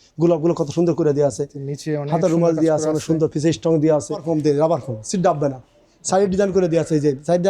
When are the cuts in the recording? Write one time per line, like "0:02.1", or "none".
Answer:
0:04.2